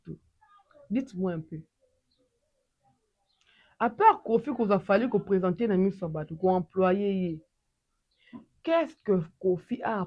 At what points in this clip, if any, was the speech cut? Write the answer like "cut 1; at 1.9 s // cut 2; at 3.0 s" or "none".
none